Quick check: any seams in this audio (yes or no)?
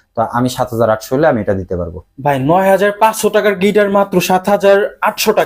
no